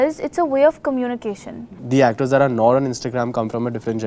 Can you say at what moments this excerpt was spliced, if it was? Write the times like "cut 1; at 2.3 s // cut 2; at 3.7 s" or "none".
cut 1; at 1.8 s